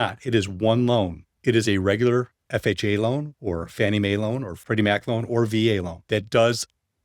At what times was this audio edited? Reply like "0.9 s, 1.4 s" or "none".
1.3 s, 4.5 s, 5.9 s